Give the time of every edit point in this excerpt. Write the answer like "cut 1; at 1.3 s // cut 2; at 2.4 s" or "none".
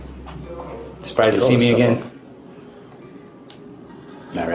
none